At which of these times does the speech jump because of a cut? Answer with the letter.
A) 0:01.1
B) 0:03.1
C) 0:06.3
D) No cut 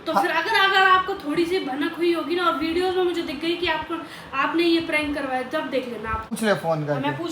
C